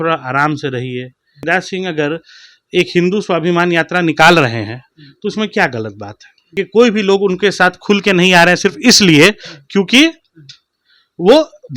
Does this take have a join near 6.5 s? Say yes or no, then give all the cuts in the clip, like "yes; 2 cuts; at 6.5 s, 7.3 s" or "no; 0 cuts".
yes; 2 cuts; at 1.4 s, 6.5 s